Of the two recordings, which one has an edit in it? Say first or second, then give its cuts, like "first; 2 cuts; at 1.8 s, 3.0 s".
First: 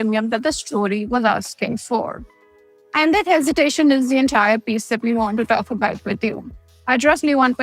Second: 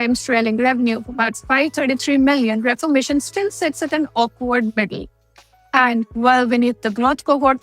second; 2 cuts; at 1.4 s, 5.3 s